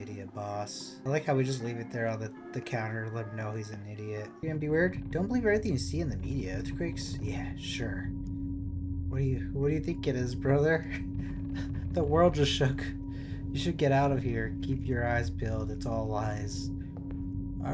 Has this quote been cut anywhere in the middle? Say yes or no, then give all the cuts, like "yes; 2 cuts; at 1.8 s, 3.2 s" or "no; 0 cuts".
yes; 2 cuts; at 1.0 s, 4.4 s